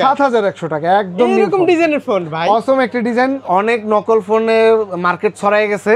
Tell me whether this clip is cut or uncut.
cut